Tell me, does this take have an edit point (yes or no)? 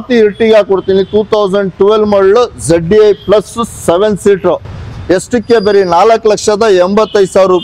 no